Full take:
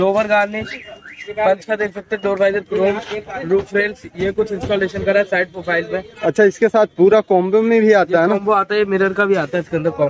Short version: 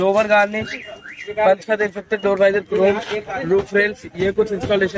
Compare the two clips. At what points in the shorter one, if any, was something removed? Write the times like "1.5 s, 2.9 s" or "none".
none

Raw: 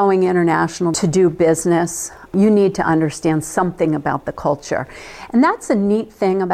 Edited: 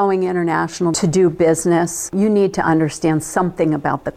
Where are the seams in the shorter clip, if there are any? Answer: 2.0 s

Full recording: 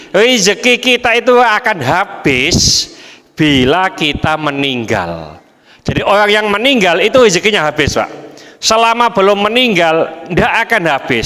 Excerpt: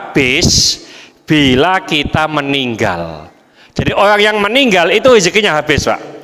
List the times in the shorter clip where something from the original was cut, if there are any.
none

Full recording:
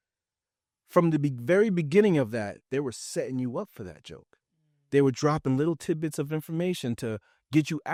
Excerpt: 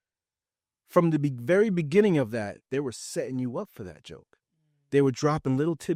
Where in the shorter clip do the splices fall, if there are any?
none

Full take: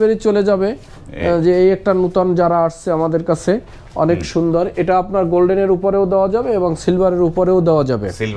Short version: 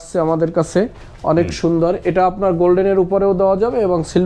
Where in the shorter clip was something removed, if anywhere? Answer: none

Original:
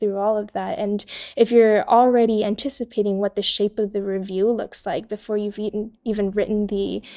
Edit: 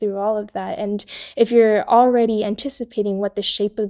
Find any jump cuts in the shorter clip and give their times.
none

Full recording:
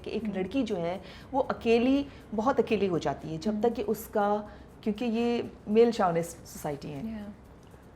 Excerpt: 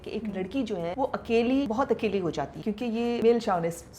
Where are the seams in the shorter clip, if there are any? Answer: 0.9 s, 1.7 s, 2.9 s

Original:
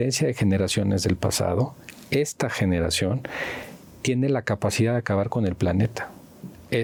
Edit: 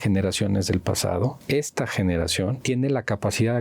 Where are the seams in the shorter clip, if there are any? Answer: 1.4 s, 2.6 s

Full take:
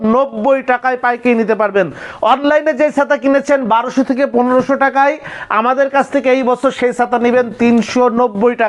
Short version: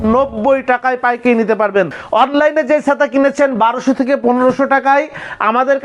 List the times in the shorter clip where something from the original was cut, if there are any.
2.0 s

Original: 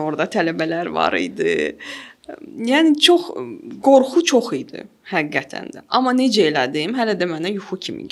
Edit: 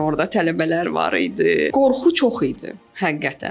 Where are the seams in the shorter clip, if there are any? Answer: 1.7 s

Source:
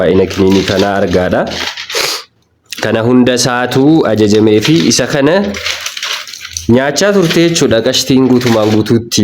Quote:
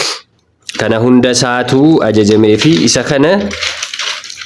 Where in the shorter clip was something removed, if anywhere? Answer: none

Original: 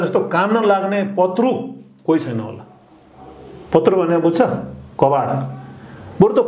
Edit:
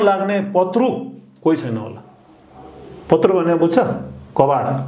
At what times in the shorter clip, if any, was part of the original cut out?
none

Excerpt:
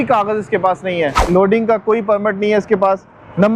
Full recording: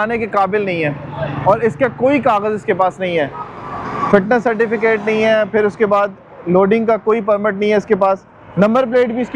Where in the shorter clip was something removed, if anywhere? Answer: 1.2 s

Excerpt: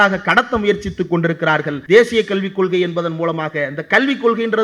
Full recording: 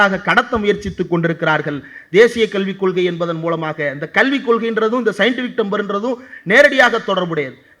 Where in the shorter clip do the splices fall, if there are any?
1.7 s

